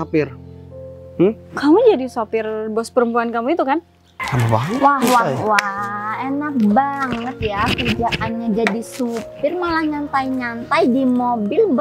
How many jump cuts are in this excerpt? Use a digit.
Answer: 1